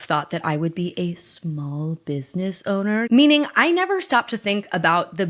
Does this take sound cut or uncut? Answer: cut